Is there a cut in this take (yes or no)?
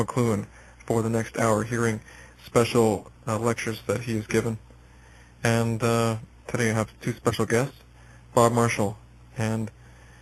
no